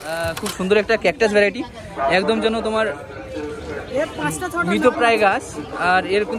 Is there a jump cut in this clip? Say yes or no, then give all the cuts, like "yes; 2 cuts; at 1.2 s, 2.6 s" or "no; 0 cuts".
no; 0 cuts